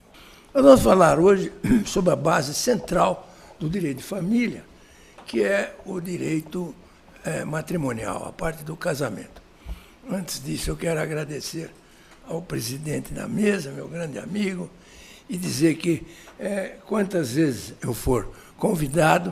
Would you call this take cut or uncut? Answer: cut